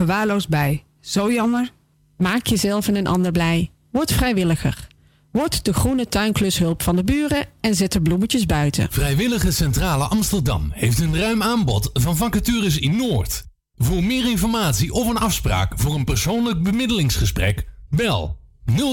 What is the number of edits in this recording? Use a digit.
1